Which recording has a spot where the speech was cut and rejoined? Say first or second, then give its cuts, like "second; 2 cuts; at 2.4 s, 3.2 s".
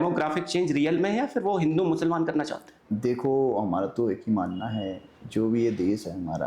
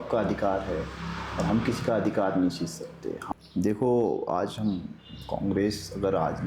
second; 1 cut; at 3.1 s